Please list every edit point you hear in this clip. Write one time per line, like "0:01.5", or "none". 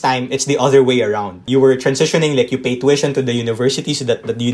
0:01.4